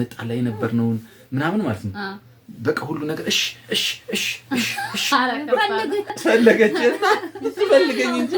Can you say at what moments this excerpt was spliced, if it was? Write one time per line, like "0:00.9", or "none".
0:06.1